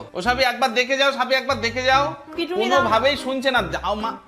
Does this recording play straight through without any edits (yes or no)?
yes